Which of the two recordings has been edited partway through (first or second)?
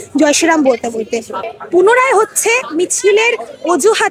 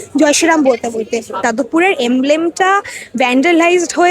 second